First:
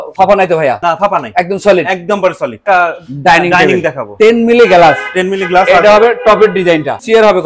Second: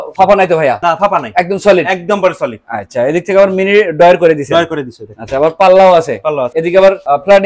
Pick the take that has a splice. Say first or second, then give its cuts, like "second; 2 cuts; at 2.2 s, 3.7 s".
first; 2 cuts; at 2.6 s, 4.1 s